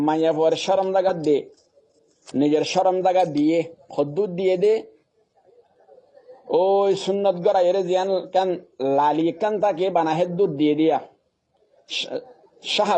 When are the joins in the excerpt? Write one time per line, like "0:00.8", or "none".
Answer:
0:01.1